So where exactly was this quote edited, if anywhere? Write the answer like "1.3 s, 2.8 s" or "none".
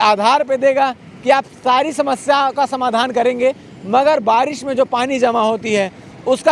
none